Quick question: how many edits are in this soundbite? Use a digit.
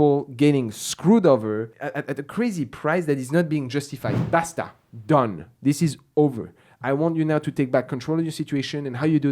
2